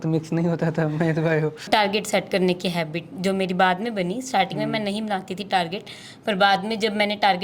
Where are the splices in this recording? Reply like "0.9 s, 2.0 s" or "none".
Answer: 1.7 s